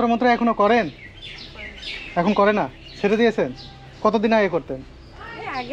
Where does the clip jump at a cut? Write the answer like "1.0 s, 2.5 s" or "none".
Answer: none